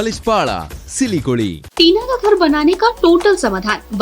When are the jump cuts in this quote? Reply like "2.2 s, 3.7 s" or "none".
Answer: 1.6 s